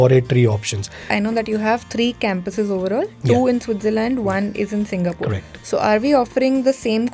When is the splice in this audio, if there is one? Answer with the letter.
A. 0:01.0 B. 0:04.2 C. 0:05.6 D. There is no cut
A